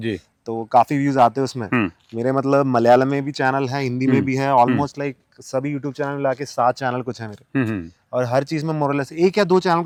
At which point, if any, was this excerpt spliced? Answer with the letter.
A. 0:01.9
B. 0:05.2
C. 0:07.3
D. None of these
D